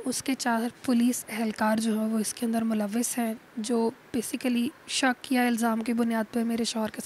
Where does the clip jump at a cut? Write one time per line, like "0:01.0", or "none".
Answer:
none